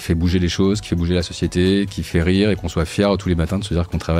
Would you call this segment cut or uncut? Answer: uncut